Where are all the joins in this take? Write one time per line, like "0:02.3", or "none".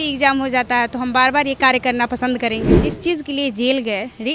0:02.9